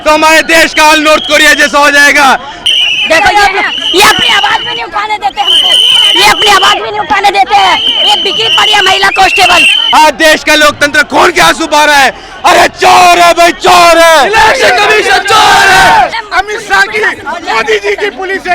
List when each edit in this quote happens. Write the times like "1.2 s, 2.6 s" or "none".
2.5 s, 9.8 s, 16.1 s

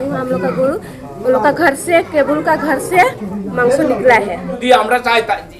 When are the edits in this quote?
4.6 s

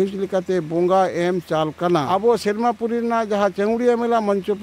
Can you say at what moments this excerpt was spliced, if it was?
2.1 s

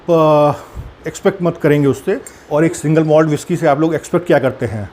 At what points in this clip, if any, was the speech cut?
2.3 s

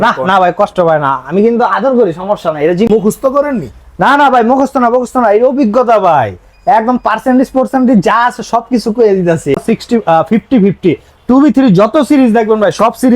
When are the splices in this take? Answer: 2.9 s, 9.6 s

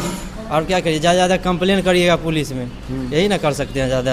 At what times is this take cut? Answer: none

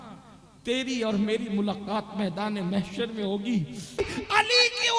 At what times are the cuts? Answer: 3.9 s

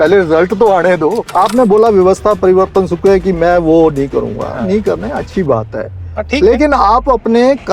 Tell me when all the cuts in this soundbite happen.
1.2 s

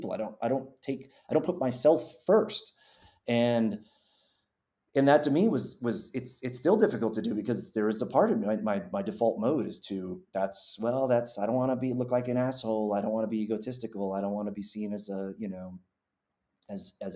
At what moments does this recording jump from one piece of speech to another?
none

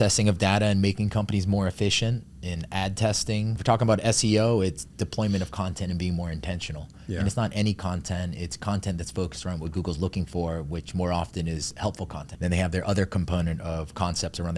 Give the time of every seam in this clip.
3.6 s, 12.2 s

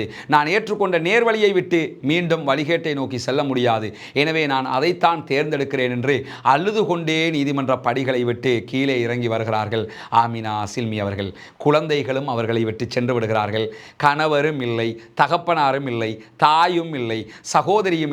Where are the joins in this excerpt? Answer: none

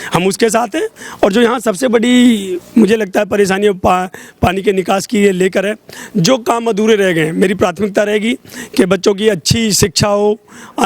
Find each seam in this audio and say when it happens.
1.0 s

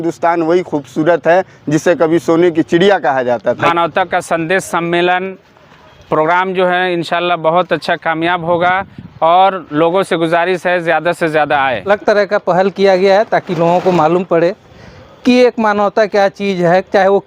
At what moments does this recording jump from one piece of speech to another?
3.7 s, 11.8 s

